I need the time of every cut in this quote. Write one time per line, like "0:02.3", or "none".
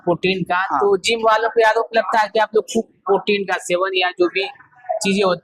none